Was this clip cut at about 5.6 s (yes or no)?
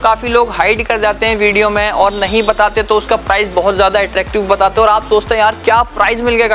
no